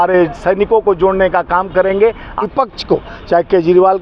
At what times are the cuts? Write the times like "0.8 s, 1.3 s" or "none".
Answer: 2.5 s

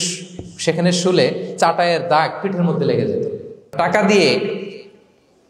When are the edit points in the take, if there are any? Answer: 3.7 s

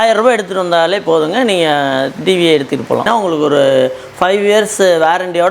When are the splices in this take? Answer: 3.1 s

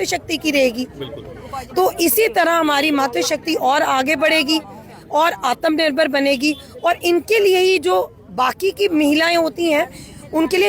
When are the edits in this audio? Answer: none

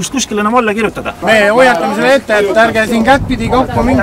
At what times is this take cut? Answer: 1.2 s

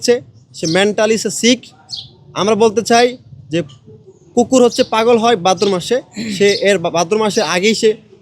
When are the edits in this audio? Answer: none

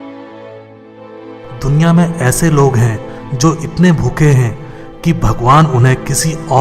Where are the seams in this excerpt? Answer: 1.1 s

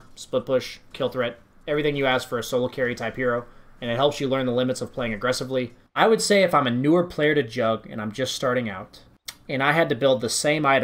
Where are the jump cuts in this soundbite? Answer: 5.8 s

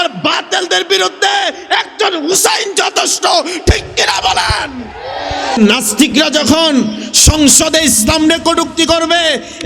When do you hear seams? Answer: 5.6 s

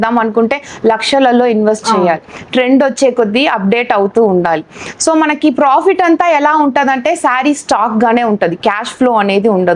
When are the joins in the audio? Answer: none

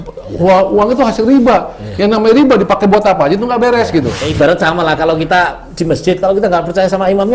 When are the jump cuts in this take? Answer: 4.2 s

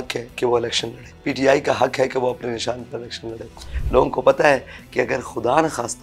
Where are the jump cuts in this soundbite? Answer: 1.1 s, 3.7 s

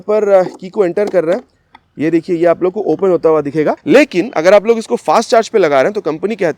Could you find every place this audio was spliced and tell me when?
3.8 s

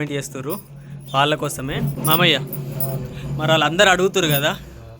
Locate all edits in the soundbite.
2.0 s

